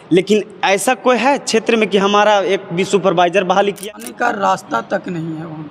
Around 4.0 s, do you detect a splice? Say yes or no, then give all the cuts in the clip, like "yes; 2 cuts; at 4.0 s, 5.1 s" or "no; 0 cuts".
yes; 1 cut; at 4.0 s